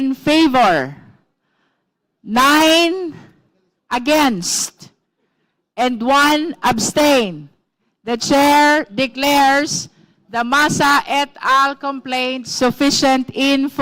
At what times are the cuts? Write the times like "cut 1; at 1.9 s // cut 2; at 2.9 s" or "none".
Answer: none

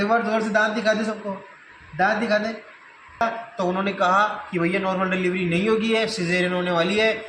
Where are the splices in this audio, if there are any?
cut 1; at 3.2 s

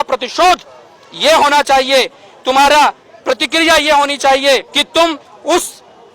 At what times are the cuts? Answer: cut 1; at 4.8 s

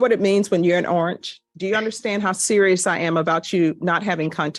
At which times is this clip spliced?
cut 1; at 1.4 s

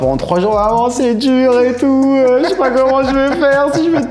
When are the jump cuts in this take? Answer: none

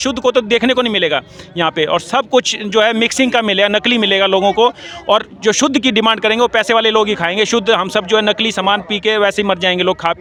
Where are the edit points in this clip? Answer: none

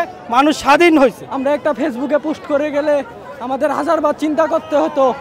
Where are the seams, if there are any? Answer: cut 1; at 1.3 s

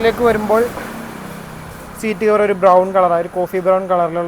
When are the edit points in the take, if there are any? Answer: none

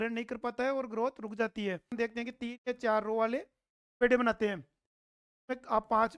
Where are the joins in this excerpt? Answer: cut 1; at 1.9 s

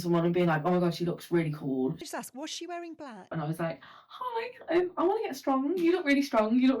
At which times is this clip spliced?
cut 1; at 2.1 s // cut 2; at 3.3 s

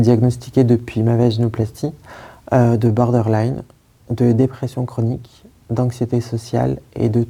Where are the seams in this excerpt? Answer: none

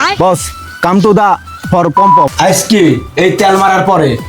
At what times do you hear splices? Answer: cut 1; at 1.9 s

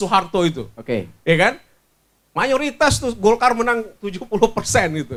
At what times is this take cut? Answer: none

